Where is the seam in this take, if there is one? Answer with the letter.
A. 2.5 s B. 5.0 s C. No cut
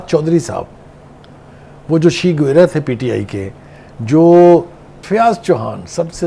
B